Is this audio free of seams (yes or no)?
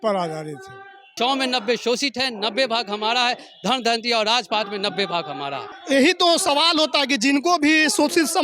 no